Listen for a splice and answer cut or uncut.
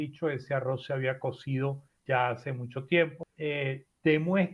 cut